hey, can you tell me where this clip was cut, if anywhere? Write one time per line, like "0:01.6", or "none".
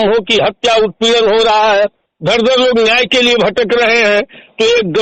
none